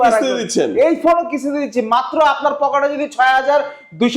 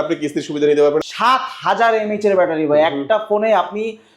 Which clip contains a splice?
second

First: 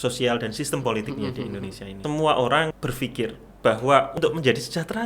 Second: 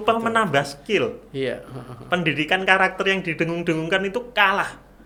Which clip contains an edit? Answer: first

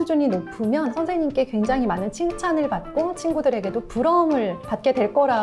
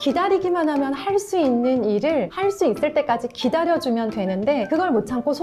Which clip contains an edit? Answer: first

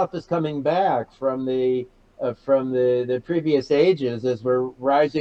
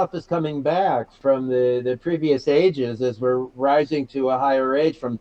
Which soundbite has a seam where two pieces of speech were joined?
second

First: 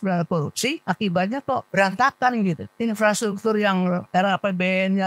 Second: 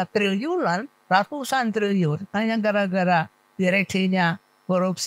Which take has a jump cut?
first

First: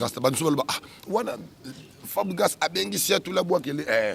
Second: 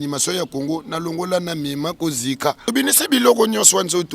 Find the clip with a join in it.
second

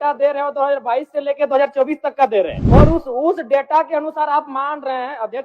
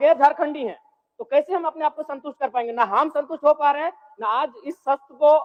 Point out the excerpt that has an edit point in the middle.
first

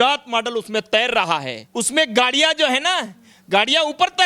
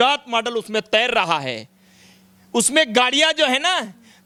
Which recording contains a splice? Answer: first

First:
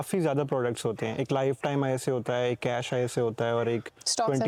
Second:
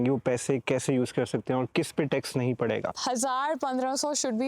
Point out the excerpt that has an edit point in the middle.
second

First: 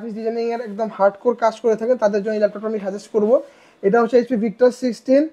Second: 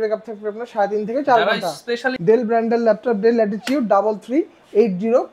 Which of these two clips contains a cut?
second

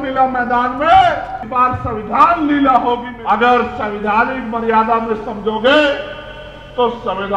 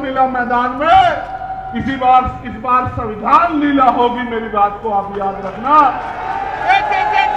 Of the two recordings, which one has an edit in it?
first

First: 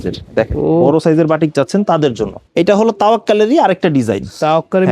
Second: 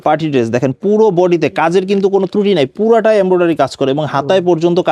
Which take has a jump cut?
first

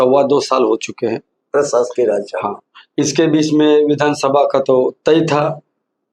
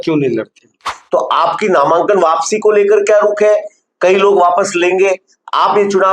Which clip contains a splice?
second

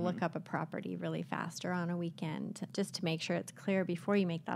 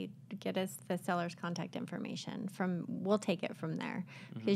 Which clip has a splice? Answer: first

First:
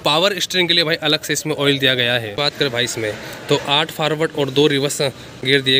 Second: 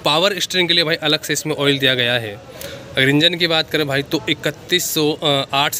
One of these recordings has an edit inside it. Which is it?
first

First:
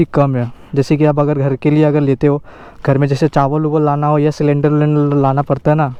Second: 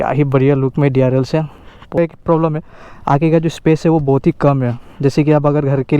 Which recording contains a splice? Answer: second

